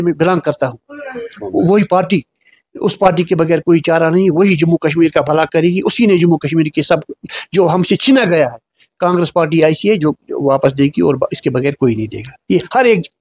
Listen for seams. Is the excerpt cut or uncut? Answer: uncut